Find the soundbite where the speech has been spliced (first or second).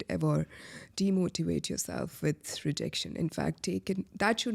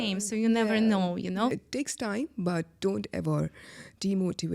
second